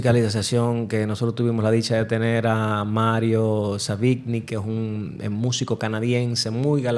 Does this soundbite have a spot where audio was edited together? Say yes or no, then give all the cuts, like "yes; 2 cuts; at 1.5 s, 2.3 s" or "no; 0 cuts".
no; 0 cuts